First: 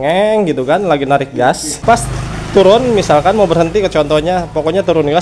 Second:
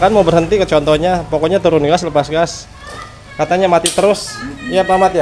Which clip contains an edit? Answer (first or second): first